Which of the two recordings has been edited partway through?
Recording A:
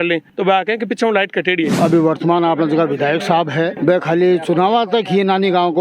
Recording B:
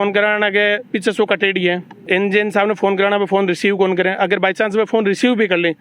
A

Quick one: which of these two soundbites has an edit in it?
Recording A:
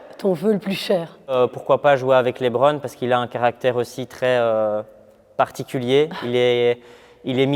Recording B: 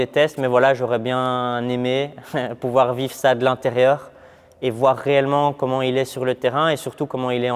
A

